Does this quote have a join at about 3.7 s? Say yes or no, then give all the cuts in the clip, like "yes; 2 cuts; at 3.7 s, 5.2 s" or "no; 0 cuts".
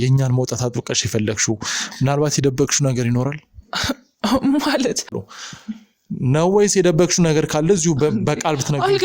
no; 1 cut; at 5.2 s